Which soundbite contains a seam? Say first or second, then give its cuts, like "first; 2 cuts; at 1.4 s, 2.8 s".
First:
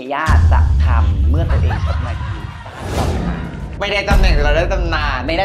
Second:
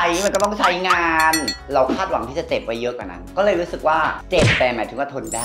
second; 2 cuts; at 1.6 s, 4.2 s